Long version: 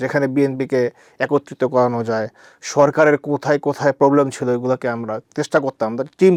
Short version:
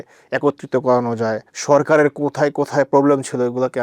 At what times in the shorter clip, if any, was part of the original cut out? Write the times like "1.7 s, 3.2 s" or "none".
1.5 s